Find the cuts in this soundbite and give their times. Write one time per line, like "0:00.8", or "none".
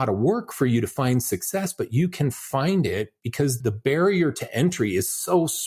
0:03.6